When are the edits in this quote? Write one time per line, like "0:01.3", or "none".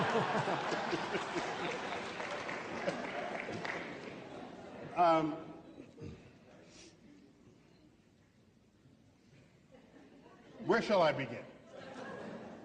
none